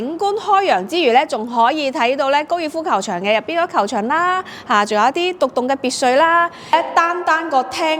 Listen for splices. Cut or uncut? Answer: cut